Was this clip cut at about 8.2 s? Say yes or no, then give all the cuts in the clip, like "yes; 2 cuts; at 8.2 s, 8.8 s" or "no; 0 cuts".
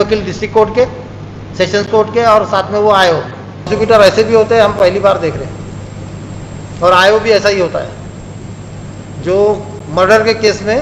no; 1 cut; at 3.7 s